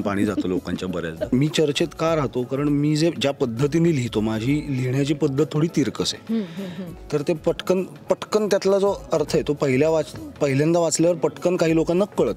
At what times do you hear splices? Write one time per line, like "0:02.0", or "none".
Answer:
0:01.3